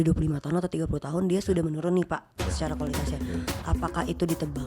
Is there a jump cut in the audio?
no; 0 cuts

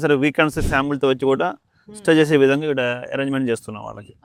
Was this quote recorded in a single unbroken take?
yes; 0 cuts

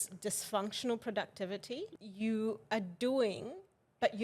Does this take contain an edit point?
yes; 1 cut; at 1.8 s

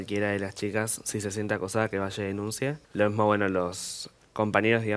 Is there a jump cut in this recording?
yes; 1 cut; at 2.8 s

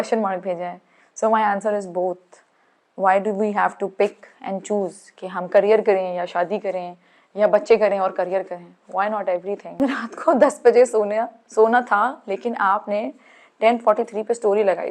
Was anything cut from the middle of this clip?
yes; 1 cut; at 9.8 s

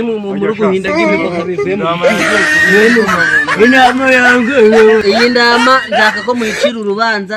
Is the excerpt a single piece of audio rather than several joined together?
no; 1 cut; at 5.0 s

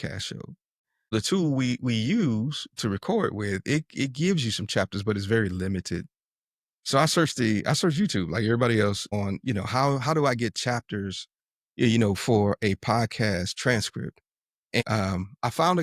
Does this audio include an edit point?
yes; 3 cuts; at 1.1 s, 9.1 s, 14.8 s

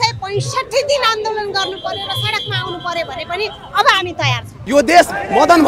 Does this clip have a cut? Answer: yes; 1 cut; at 4.6 s

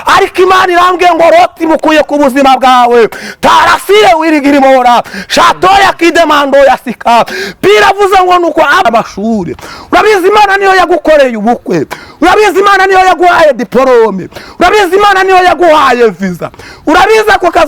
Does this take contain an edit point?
yes; 1 cut; at 8.8 s

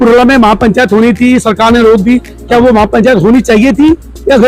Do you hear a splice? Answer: no; 0 cuts

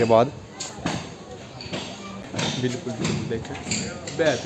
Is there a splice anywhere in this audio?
yes; 1 cut; at 2.3 s

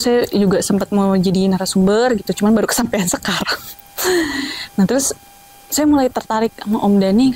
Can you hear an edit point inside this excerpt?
no; 0 cuts

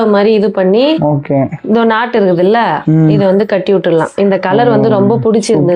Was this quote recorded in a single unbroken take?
yes; 0 cuts

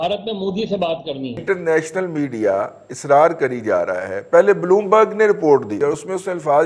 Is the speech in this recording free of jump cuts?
no; 2 cuts; at 1.4 s, 5.8 s

